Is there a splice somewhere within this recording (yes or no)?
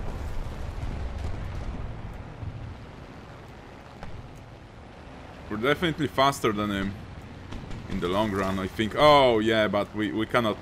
no